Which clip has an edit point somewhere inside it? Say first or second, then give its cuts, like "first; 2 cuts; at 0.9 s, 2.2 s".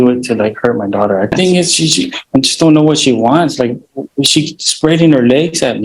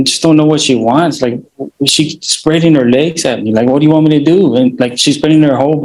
first; 1 cut; at 1.3 s